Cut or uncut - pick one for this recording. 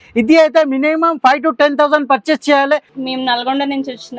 cut